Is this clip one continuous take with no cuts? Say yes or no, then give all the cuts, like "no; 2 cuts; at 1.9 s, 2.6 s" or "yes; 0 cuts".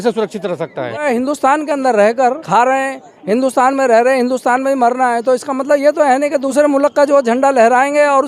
no; 3 cuts; at 1.0 s, 2.4 s, 6.5 s